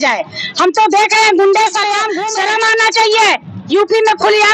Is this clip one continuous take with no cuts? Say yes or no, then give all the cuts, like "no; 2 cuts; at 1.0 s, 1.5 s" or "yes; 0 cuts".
no; 1 cut; at 2.1 s